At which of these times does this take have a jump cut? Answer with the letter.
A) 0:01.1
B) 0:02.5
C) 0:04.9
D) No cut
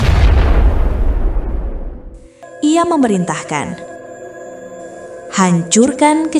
B